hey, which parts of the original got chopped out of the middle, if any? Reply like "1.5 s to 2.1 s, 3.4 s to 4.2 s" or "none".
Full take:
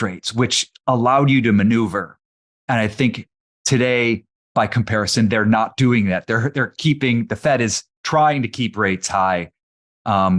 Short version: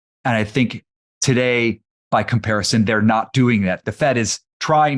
6.3 s to 7.3 s